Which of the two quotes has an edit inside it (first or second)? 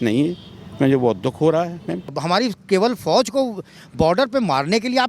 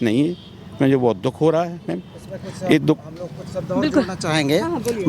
first